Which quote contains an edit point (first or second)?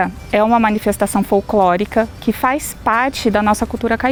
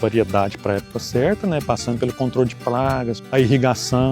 second